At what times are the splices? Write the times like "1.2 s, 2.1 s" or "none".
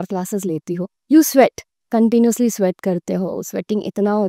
1.0 s